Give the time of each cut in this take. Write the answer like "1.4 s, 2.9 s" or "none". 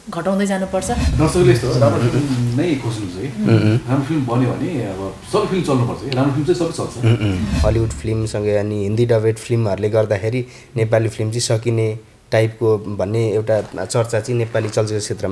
1.1 s, 7.5 s